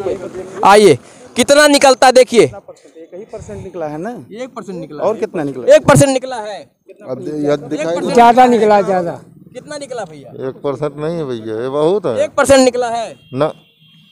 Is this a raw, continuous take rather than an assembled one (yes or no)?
yes